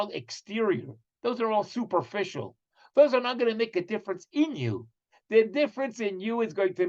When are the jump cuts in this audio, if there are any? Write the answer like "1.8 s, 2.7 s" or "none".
none